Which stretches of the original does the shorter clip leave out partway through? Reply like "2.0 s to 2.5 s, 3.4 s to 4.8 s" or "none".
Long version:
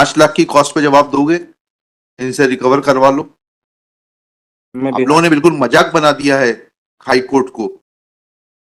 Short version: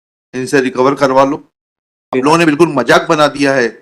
4.2 s to 5.1 s